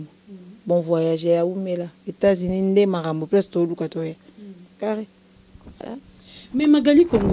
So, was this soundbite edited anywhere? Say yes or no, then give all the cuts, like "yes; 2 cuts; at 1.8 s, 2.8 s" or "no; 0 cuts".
yes; 1 cut; at 5.8 s